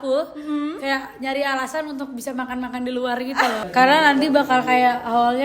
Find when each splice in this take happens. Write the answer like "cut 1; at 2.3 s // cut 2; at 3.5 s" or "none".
cut 1; at 3.6 s